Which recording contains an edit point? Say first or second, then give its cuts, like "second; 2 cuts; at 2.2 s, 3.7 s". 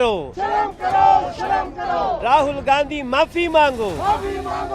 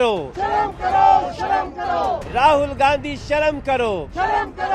first; 1 cut; at 2.2 s